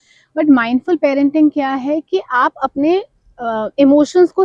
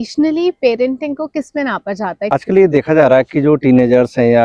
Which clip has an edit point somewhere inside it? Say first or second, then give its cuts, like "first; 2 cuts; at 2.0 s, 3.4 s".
second; 1 cut; at 2.3 s